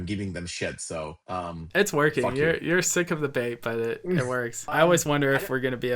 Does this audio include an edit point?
yes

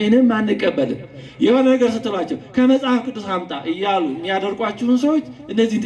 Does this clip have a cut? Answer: no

